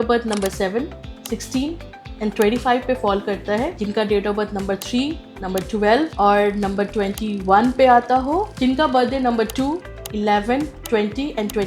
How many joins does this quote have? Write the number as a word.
four